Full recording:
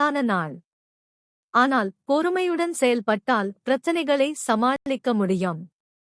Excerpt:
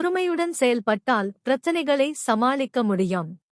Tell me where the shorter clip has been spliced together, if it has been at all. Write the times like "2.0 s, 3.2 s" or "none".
2.6 s